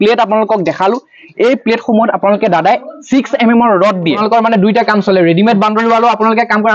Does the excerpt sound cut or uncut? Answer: cut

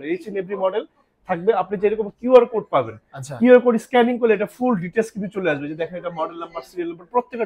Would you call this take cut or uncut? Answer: uncut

